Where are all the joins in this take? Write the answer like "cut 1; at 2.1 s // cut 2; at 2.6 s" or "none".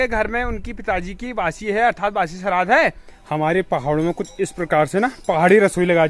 cut 1; at 3.1 s